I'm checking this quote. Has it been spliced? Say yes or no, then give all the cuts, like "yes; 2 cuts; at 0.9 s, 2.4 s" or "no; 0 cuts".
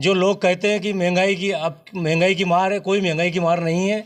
no; 0 cuts